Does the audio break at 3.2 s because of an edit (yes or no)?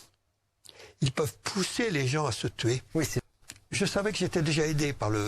yes